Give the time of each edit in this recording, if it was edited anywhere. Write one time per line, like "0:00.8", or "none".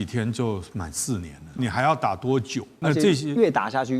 0:01.5
0:02.6